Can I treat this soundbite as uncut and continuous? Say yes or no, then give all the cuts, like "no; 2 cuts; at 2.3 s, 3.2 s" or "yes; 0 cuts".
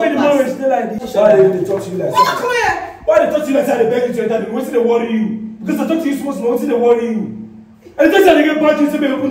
no; 1 cut; at 1.0 s